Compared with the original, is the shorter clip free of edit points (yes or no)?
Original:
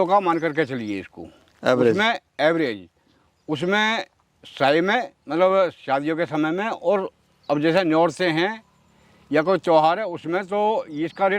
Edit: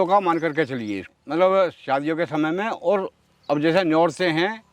no